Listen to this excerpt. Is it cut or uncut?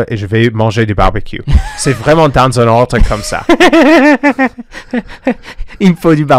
uncut